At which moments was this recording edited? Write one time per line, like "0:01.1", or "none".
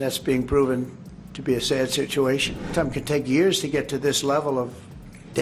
0:02.6

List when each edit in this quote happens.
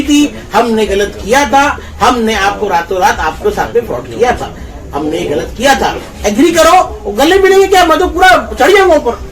none

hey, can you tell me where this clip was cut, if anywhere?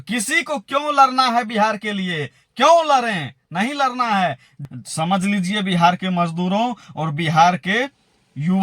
0:04.5

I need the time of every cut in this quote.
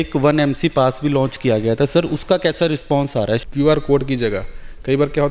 0:03.4

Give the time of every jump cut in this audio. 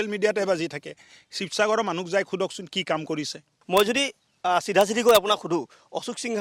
0:03.5

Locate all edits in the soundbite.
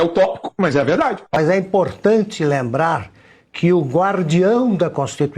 0:01.4

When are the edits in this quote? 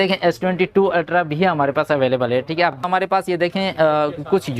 0:02.8

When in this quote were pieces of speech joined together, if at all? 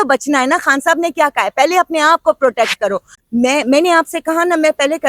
0:03.1

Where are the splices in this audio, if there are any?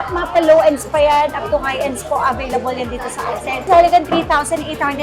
0:03.6

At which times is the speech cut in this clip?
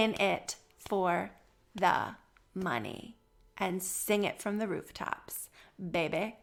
none

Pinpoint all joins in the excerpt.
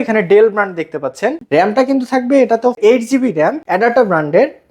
0:01.4
0:02.8
0:03.6

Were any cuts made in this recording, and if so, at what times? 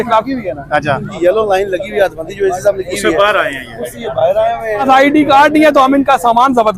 0:01.1
0:04.8

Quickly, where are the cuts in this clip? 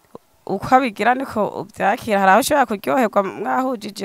none

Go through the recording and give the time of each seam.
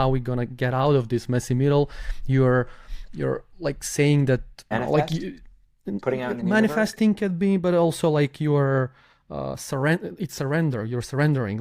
0:04.7

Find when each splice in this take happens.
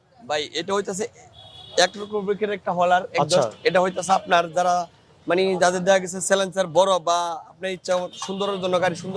none

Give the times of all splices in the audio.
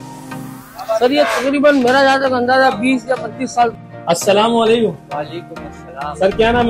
0:03.8

